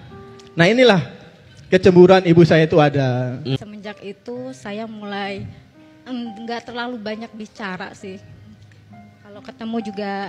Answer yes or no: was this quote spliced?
yes